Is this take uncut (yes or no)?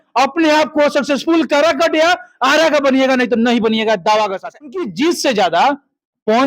no